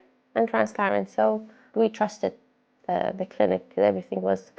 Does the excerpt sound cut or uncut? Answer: cut